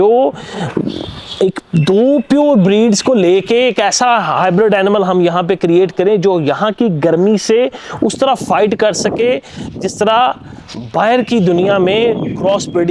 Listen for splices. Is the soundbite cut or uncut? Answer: uncut